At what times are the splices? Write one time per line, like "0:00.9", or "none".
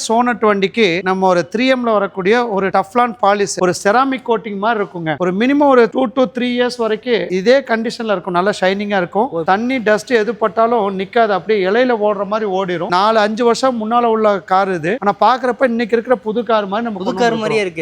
0:03.6
0:09.5
0:12.9